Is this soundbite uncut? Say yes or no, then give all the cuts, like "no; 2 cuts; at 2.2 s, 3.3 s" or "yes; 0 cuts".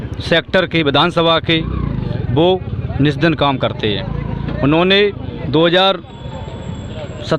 no; 1 cut; at 5.3 s